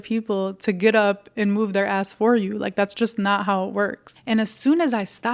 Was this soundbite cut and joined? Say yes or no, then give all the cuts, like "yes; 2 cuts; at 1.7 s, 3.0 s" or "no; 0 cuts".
yes; 1 cut; at 4.1 s